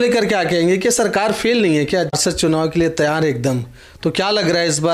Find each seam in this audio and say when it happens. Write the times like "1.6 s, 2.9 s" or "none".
2.1 s